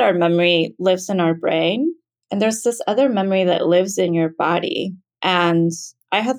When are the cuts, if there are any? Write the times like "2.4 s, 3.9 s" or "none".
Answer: 5.0 s